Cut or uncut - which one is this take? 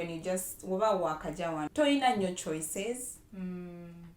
cut